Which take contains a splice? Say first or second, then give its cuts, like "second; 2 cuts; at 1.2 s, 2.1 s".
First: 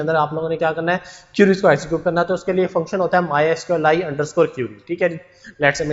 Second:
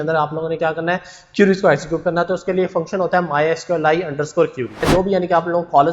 second; 1 cut; at 4.8 s